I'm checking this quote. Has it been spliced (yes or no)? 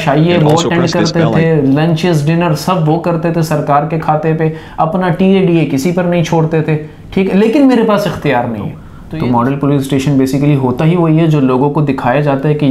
yes